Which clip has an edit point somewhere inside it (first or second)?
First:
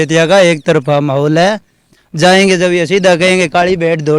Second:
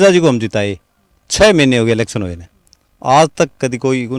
first